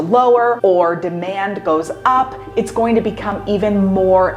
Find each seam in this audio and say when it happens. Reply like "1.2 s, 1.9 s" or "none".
none